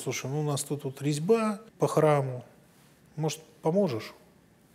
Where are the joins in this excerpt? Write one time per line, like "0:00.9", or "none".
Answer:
0:01.7